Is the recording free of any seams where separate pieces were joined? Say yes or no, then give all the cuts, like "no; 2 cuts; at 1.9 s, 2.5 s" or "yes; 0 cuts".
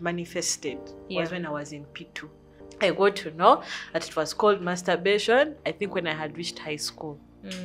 no; 1 cut; at 2.6 s